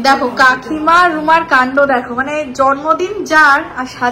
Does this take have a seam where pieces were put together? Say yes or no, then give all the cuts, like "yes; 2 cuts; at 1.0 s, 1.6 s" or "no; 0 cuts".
no; 0 cuts